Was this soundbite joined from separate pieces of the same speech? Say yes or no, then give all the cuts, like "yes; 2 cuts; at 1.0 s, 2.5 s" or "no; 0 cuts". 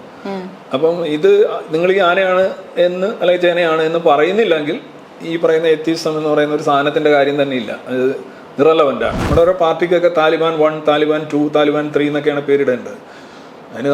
yes; 1 cut; at 9.2 s